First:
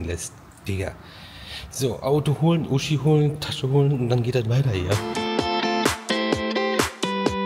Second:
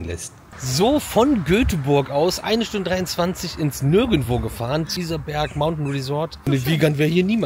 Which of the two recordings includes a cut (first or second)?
second